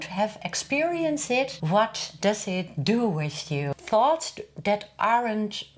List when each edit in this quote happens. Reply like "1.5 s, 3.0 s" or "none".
1.6 s, 3.7 s

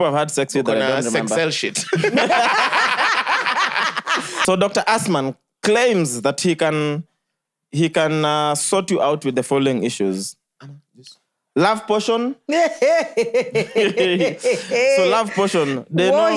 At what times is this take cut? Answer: 4.4 s

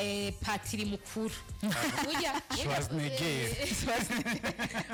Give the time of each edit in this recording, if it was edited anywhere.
none

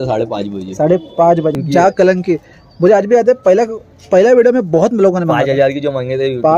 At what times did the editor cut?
1.5 s

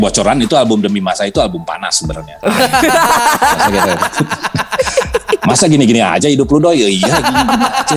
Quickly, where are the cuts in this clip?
none

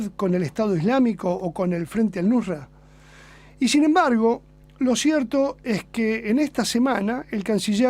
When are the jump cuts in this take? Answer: 5.9 s

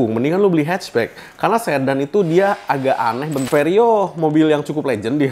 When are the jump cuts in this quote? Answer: 3.4 s

